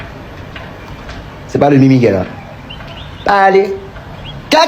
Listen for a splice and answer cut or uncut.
uncut